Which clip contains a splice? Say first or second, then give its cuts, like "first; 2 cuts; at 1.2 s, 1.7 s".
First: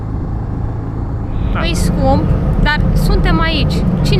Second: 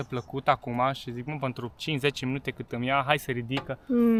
first; 1 cut; at 1.5 s